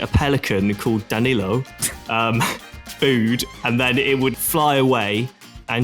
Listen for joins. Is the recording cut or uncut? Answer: uncut